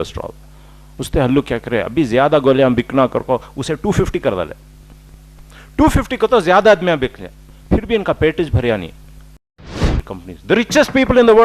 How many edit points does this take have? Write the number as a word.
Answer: one